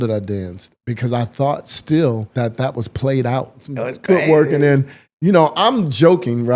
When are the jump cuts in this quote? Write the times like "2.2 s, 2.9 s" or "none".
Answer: 2.3 s, 3.7 s